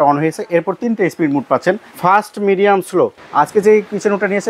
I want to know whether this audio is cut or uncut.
cut